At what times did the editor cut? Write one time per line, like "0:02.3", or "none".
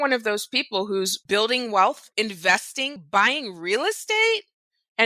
0:01.2
0:02.0